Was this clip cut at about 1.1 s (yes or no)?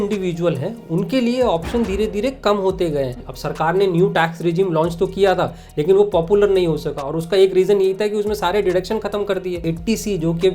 no